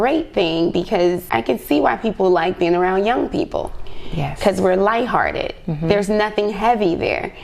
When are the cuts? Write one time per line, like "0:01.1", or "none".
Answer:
0:01.2